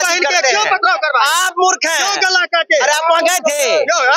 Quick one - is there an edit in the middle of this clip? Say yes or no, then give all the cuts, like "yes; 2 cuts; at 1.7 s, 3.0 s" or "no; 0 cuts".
no; 0 cuts